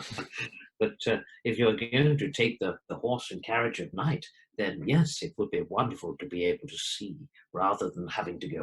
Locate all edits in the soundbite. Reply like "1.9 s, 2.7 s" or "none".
none